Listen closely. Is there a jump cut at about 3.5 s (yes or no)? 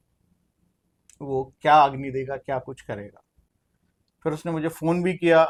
no